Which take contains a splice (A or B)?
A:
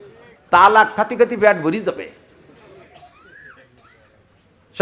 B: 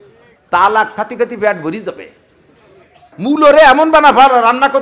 B